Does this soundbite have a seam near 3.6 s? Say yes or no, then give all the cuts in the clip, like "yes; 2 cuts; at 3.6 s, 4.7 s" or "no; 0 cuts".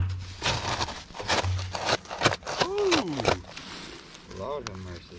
yes; 1 cut; at 3.6 s